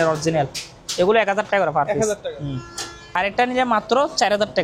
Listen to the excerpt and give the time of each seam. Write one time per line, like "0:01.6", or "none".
0:03.1